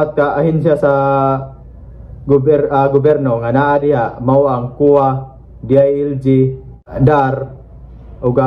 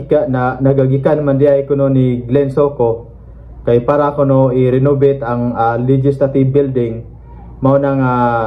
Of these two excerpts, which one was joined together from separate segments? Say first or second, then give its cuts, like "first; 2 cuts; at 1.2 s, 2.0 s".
first; 1 cut; at 6.8 s